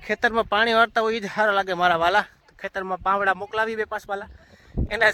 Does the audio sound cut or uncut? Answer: uncut